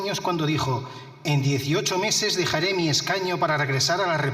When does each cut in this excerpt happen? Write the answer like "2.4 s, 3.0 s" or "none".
none